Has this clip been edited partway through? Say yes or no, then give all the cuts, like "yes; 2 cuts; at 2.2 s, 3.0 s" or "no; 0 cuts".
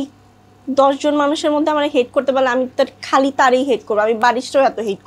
no; 0 cuts